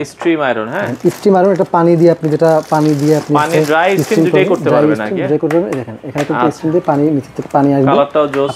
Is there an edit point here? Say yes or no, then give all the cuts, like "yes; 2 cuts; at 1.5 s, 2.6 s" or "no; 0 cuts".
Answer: no; 0 cuts